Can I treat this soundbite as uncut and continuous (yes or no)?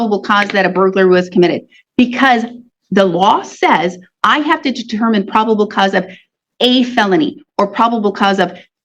yes